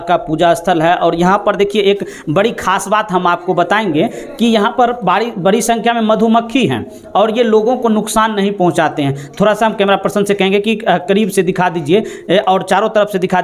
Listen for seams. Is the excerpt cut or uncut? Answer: uncut